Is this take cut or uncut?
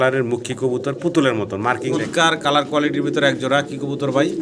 cut